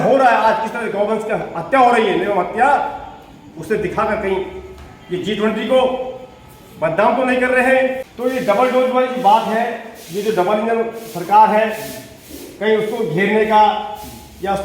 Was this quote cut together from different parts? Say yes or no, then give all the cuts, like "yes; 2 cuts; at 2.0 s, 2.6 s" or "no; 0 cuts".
yes; 1 cut; at 8.0 s